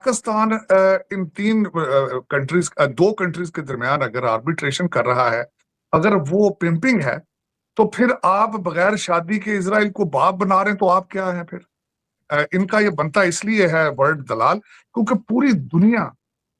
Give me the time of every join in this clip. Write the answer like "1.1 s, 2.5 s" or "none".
12.2 s